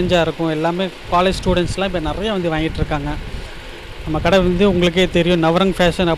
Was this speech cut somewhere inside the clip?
no; 0 cuts

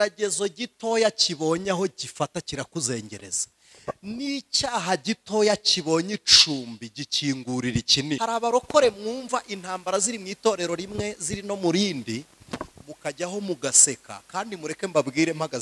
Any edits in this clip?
yes; 1 cut; at 8.2 s

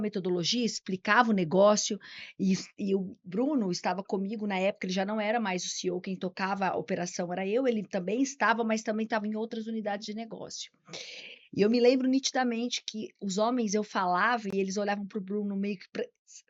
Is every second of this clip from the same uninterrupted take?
yes; 0 cuts

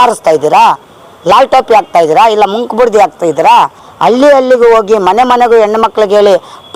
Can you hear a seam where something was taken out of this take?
yes; 1 cut; at 3.9 s

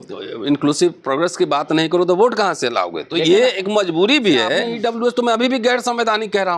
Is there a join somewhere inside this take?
yes; 1 cut; at 4.7 s

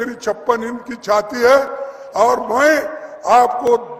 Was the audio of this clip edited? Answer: no; 0 cuts

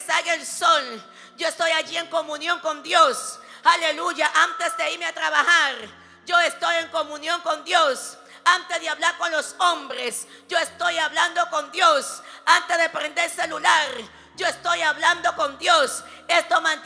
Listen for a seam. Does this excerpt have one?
no; 0 cuts

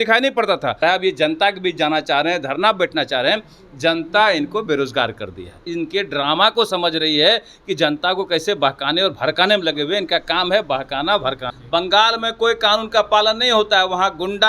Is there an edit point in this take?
yes; 3 cuts; at 0.8 s, 5.7 s, 11.5 s

